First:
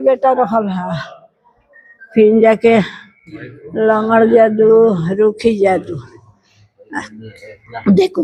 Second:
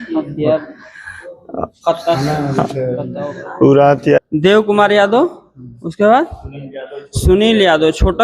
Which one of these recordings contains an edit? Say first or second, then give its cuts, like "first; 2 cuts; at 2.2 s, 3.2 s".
second; 1 cut; at 4.2 s